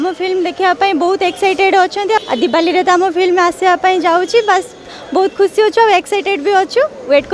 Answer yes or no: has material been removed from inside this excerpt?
yes